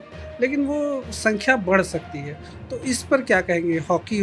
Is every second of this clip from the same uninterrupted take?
yes; 0 cuts

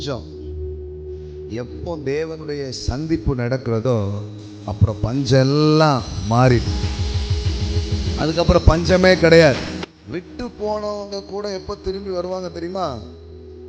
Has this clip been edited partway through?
yes; 1 cut; at 9.8 s

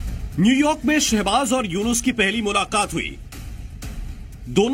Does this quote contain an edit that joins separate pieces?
no; 0 cuts

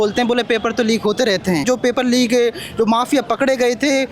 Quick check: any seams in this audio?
yes; 1 cut; at 1.6 s

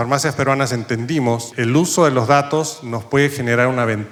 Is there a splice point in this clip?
no; 0 cuts

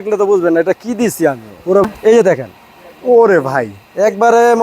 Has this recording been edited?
yes; 1 cut; at 1.9 s

